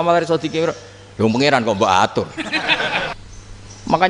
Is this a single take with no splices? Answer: no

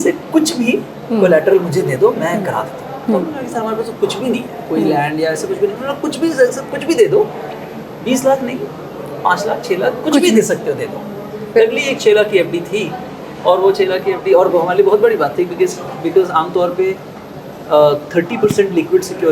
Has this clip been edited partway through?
no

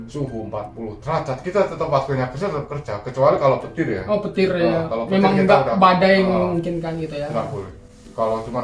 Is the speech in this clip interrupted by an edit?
no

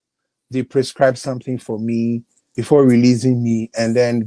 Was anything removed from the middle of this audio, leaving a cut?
yes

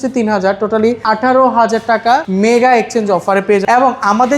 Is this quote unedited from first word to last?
no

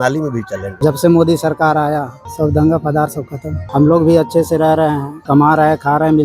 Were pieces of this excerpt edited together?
yes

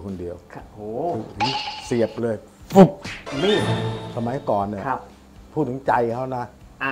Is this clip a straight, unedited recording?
yes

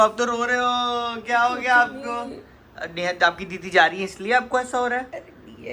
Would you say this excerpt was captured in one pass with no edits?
yes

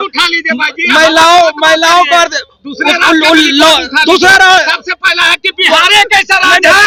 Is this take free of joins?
yes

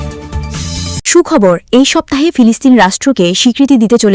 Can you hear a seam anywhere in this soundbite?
no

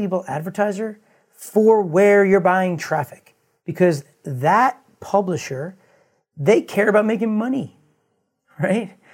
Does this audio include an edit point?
no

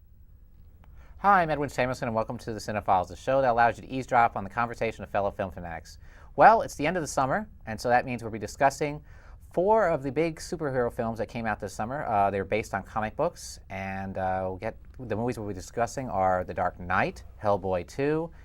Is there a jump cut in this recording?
no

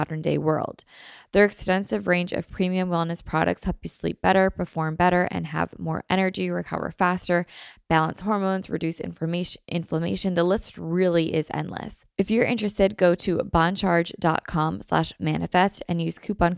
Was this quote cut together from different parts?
yes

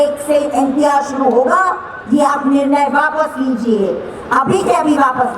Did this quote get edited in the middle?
no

